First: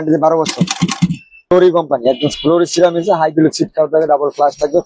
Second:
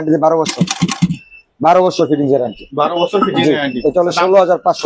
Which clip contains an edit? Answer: first; 1 cut; at 1.5 s

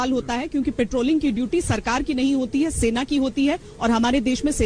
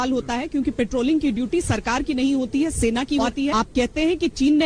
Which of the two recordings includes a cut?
second; 1 cut; at 3.5 s

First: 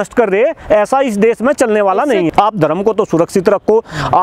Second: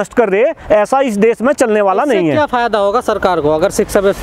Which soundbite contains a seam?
first; 1 cut; at 2.3 s

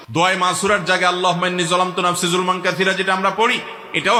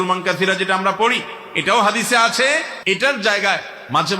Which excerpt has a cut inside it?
second; 1 cut; at 2.7 s

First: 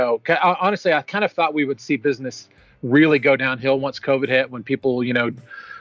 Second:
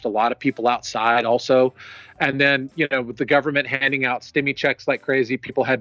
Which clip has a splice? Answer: first; 1 cut; at 1.0 s

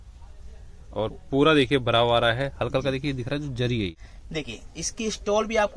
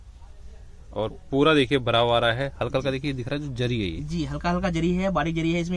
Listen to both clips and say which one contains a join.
first; 1 cut; at 4.0 s

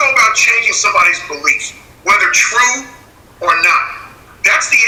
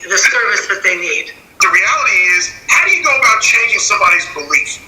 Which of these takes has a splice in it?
second; 1 cut; at 1.6 s

